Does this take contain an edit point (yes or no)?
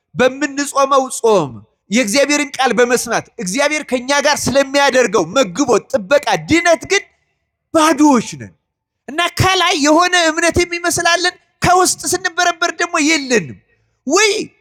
no